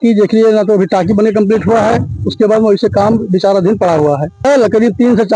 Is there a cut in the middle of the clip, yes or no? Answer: yes